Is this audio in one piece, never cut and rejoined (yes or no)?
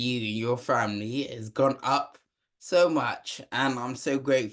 yes